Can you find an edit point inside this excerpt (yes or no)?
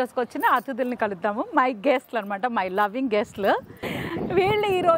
yes